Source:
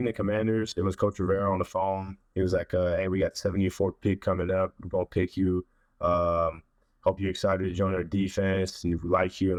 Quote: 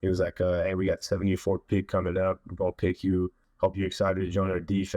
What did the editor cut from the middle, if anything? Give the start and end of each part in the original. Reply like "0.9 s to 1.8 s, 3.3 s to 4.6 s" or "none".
5.8 s to 6.9 s